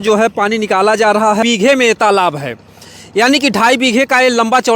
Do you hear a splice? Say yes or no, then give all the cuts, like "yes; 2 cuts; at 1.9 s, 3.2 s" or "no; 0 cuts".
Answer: yes; 1 cut; at 1.4 s